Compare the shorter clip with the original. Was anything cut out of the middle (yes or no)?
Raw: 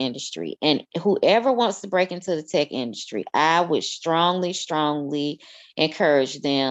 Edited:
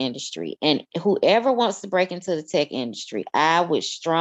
no